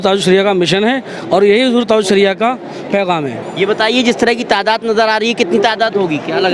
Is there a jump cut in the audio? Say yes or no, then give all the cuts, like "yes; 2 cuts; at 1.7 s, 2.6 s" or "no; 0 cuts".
no; 0 cuts